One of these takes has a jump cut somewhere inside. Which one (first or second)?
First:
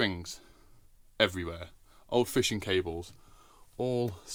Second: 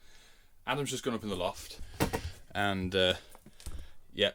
second